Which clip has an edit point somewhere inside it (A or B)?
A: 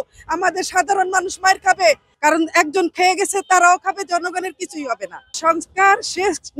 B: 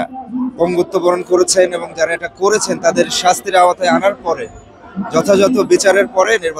A